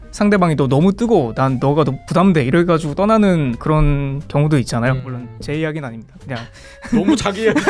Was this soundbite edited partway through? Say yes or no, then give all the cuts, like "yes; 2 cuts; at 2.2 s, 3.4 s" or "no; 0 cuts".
no; 0 cuts